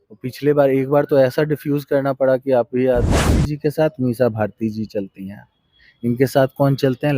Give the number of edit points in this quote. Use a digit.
1